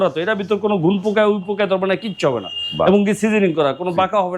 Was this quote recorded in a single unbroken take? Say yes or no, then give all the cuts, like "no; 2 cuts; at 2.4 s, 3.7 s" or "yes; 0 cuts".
yes; 0 cuts